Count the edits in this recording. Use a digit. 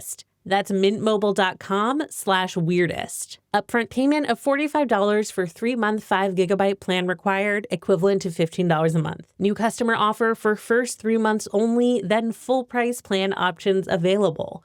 0